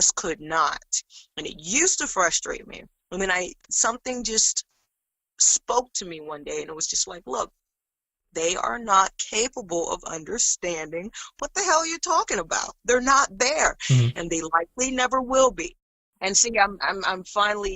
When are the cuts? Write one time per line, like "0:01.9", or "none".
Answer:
0:16.2